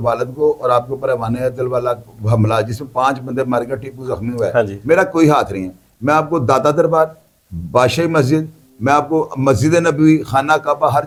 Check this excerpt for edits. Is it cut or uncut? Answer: uncut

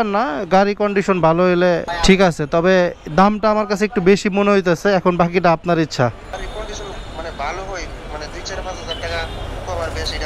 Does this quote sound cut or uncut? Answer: cut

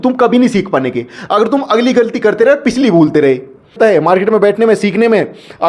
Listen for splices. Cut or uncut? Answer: cut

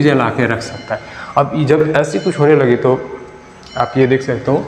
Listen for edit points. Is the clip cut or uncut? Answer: uncut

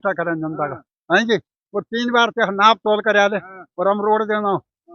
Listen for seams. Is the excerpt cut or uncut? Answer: uncut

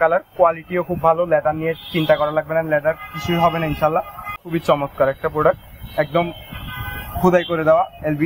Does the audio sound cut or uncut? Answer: cut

